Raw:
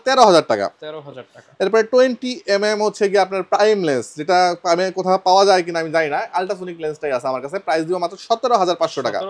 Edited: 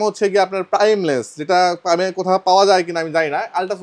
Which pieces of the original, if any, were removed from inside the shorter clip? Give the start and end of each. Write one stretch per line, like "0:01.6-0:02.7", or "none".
none